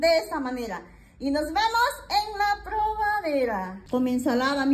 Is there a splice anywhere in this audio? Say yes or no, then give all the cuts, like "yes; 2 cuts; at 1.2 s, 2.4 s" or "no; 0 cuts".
yes; 1 cut; at 3.7 s